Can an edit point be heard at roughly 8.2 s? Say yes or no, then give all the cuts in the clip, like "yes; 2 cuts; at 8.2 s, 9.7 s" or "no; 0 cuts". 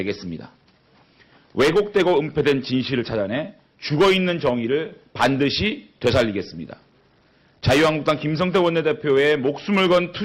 yes; 1 cut; at 8.2 s